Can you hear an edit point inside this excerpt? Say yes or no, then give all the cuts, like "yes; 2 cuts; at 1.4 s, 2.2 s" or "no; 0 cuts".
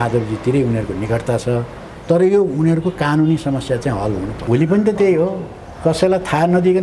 yes; 1 cut; at 4.4 s